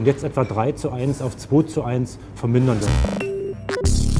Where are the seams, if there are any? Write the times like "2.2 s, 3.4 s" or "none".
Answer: 3.0 s